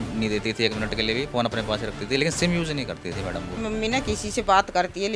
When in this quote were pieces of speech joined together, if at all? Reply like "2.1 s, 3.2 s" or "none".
3.6 s